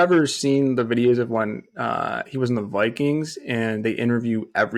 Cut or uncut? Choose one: uncut